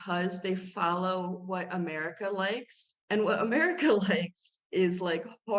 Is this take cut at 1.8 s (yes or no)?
no